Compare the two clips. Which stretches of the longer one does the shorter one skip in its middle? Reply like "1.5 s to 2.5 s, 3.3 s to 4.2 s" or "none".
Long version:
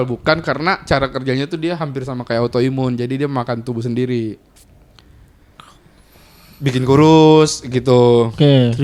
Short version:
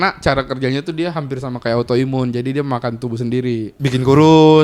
4.4 s to 6.5 s